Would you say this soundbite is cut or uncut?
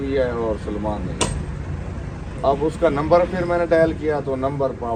uncut